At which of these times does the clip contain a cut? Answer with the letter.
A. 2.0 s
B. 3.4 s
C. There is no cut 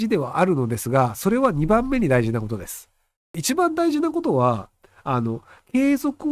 B